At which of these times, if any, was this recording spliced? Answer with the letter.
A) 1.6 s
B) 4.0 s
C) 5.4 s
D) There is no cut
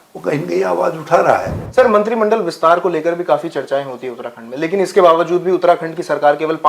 A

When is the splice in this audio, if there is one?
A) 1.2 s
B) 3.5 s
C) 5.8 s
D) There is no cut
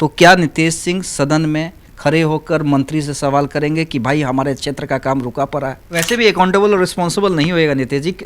C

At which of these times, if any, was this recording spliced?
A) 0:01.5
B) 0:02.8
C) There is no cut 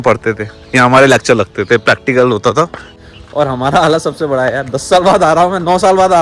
B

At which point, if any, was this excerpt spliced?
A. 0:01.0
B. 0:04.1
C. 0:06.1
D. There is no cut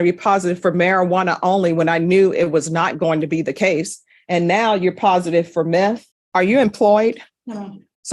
C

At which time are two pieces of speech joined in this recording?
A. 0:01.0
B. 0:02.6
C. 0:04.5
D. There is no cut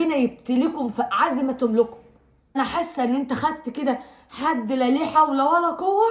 B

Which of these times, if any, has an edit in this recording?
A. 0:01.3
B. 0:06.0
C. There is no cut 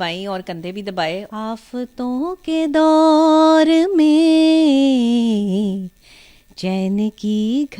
A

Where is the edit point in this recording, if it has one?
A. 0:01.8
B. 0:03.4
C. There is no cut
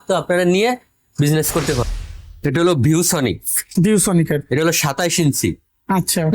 A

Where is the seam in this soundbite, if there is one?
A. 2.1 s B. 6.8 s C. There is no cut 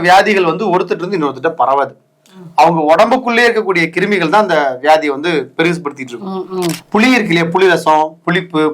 B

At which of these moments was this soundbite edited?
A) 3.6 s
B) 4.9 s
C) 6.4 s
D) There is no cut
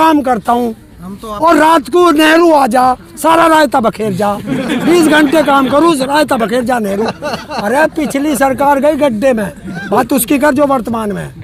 D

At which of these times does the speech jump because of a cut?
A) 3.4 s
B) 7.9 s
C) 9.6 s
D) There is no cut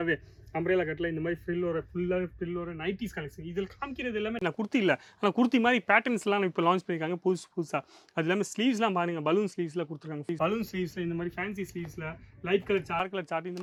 D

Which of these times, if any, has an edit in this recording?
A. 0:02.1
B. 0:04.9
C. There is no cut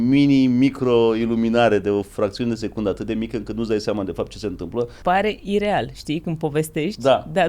B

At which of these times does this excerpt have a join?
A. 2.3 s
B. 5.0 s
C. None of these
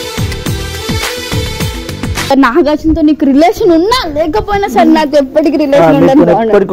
A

